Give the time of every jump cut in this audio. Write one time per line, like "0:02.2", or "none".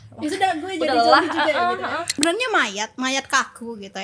0:02.2